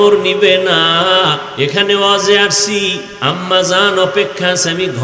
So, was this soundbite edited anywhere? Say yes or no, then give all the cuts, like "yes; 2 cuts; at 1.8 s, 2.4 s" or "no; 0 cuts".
yes; 2 cuts; at 1.5 s, 3.1 s